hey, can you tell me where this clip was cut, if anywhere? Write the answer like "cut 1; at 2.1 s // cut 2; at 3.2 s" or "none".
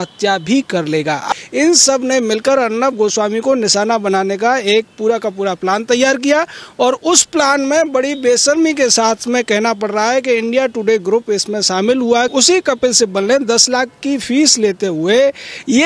cut 1; at 1.3 s // cut 2; at 12.3 s